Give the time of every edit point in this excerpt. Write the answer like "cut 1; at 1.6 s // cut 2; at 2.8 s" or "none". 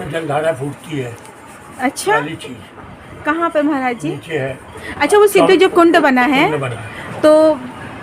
none